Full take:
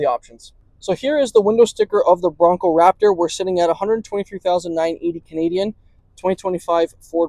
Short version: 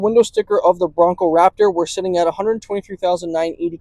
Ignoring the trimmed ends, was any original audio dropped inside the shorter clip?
no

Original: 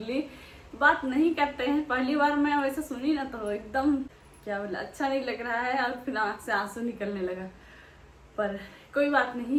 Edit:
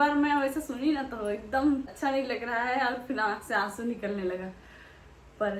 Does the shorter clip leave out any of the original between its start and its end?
yes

